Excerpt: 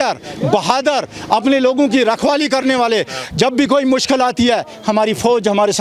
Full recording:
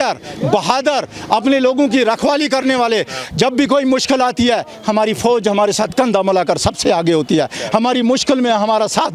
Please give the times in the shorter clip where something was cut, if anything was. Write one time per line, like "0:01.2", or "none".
none

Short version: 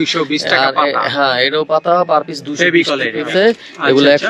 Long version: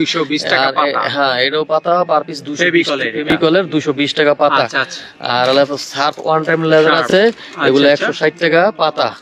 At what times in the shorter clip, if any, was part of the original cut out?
0:03.2

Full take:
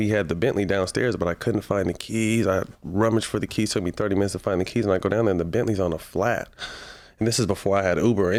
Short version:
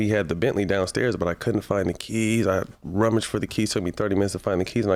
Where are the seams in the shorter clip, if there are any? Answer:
none

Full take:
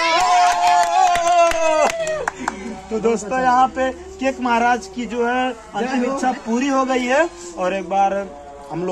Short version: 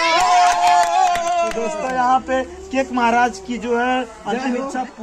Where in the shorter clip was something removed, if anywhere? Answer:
0:01.7

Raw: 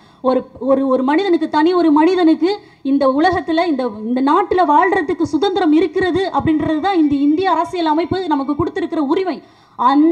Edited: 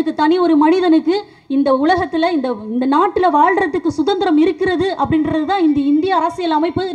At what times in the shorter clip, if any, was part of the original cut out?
none

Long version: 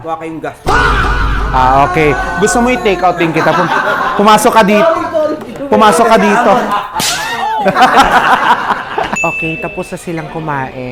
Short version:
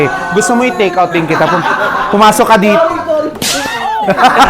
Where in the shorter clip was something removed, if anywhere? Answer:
0:03.4

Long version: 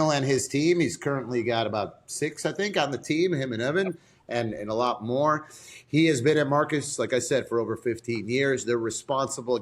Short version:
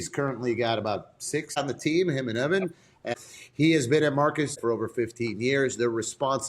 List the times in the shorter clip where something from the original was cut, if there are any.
0:01.6
0:03.1
0:04.6

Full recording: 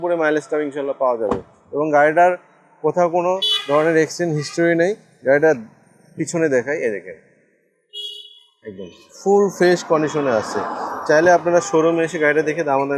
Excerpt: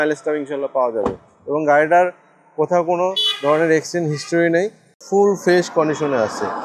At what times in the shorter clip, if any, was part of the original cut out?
0:04.8

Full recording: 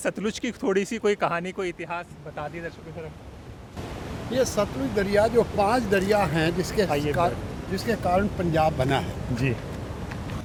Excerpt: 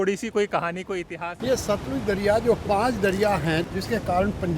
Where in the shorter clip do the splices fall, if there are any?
0:01.4
0:03.7

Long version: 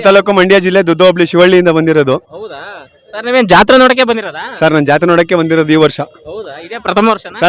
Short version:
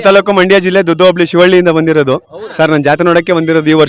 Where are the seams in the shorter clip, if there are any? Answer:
0:02.4

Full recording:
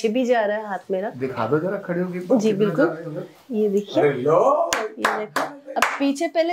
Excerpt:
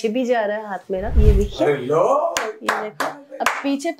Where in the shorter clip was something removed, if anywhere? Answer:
0:01.1

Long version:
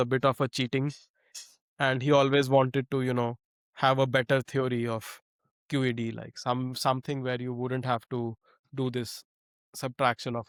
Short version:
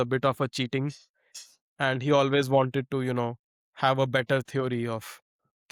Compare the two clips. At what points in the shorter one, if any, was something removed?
none

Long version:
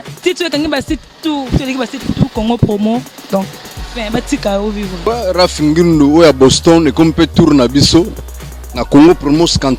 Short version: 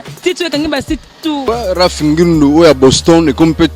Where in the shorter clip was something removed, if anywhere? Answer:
0:01.4

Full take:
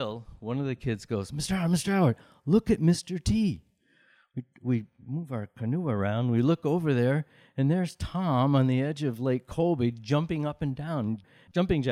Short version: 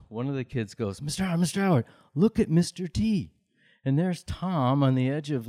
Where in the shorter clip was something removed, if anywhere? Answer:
0:03.7

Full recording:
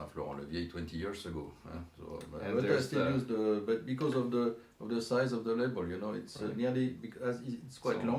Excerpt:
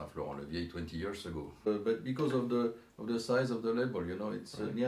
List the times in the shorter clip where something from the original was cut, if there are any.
0:01.7

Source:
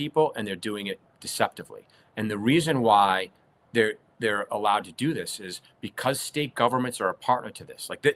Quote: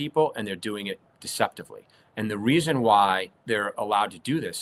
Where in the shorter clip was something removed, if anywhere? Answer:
0:03.3

